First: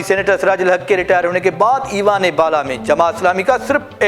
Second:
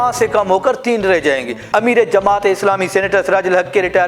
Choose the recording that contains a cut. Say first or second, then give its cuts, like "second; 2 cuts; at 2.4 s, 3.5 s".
second; 1 cut; at 1.6 s